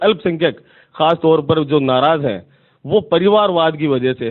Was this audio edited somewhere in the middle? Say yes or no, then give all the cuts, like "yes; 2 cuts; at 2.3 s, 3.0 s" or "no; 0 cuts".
no; 0 cuts